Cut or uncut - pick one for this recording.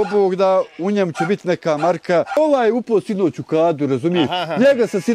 cut